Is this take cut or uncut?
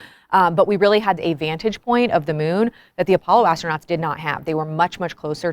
cut